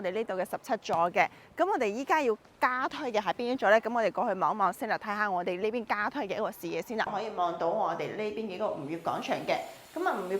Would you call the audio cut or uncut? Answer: cut